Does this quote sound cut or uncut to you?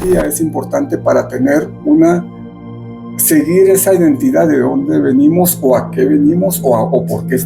uncut